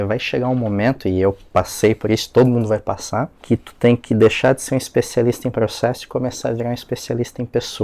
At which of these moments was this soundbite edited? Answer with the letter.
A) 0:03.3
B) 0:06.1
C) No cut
A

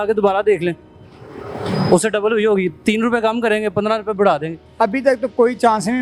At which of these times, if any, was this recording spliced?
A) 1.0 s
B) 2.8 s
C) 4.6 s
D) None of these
C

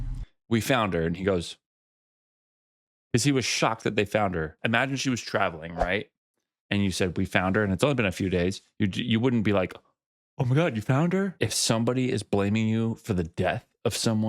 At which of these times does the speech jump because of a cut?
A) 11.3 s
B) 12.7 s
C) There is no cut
A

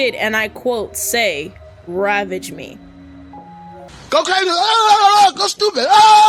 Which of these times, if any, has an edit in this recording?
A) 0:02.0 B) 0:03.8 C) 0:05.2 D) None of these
D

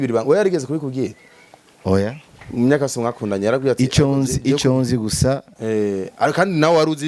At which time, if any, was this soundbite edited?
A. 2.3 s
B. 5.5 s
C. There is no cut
B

